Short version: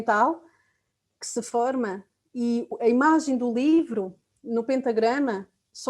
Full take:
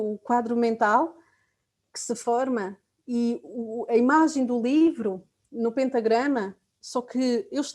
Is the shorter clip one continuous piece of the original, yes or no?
no